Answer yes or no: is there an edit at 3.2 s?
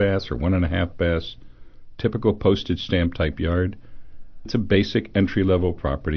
no